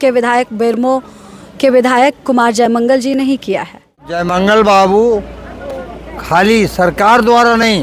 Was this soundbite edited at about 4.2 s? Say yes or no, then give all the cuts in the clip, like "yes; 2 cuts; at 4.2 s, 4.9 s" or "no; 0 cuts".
yes; 1 cut; at 4.2 s